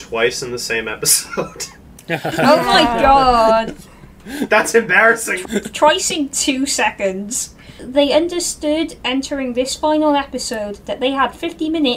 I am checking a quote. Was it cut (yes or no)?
yes